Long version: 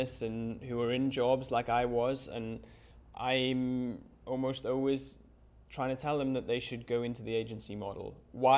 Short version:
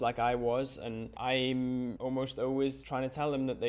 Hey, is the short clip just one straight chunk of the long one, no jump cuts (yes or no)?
no